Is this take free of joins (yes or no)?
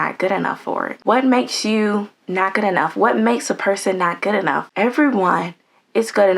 no